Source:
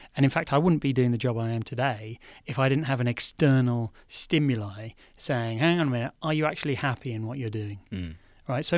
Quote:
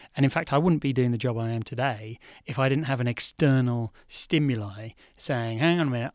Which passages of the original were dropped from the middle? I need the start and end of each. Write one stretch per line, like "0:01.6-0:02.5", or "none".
none